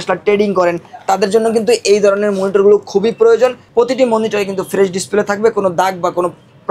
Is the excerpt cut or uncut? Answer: cut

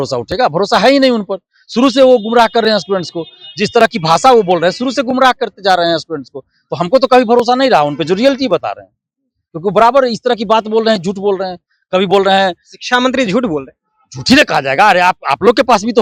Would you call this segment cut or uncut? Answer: uncut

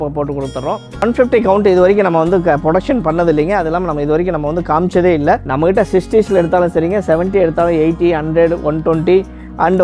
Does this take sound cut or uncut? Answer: cut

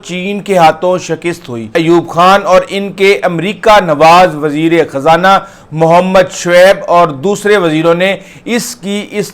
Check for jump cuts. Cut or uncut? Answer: cut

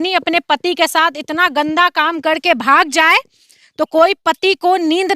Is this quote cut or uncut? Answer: uncut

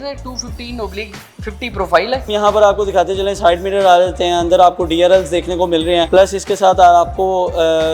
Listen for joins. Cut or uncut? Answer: cut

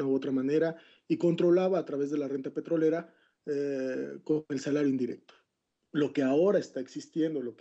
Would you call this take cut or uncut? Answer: cut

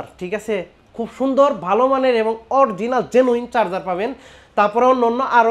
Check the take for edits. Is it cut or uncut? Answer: uncut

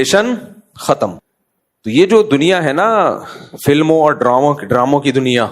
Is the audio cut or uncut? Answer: cut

